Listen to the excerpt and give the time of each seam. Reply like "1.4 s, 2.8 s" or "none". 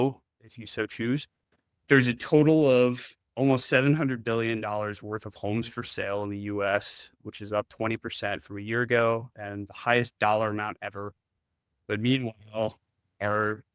1.8 s